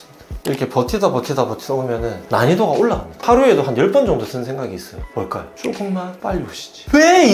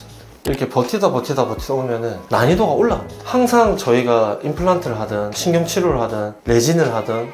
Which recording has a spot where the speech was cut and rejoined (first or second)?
first